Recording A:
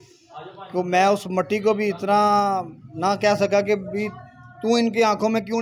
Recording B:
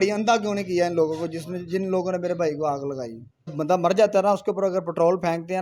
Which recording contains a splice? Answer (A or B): B